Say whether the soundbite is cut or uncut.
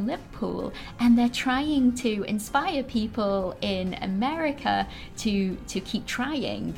uncut